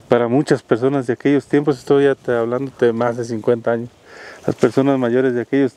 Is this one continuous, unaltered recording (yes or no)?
yes